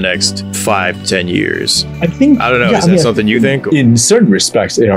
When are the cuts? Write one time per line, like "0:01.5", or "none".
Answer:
none